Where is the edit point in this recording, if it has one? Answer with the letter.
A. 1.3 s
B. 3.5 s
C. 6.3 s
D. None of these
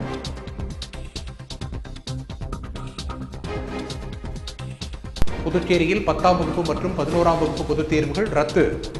D